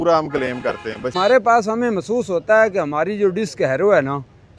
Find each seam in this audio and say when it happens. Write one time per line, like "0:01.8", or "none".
0:01.1